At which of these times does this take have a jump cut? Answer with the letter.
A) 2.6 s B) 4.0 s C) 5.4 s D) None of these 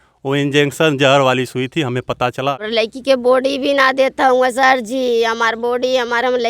A